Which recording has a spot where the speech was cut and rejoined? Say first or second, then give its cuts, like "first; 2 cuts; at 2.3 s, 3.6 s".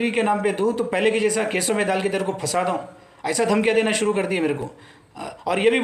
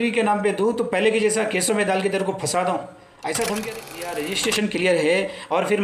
second; 1 cut; at 4.0 s